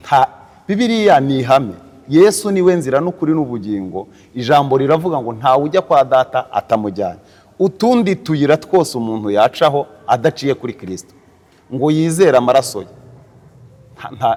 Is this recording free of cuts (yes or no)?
yes